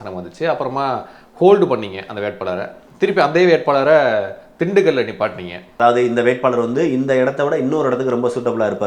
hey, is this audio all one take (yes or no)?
no